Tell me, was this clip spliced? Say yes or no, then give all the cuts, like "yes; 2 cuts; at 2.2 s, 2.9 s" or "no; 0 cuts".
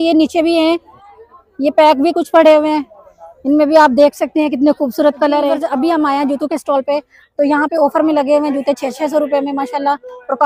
yes; 1 cut; at 5.6 s